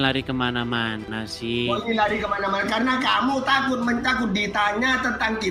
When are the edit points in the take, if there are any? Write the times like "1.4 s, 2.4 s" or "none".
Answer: none